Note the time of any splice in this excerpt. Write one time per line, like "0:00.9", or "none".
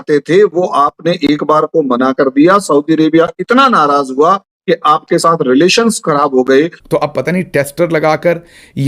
0:06.8